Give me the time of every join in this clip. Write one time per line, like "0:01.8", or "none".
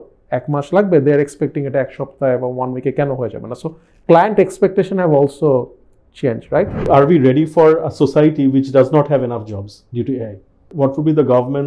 0:06.9
0:10.7